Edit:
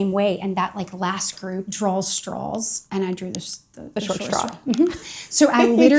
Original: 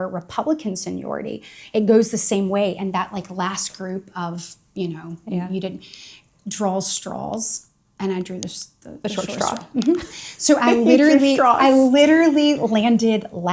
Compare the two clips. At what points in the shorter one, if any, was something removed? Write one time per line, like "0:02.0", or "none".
0:01.7
0:02.8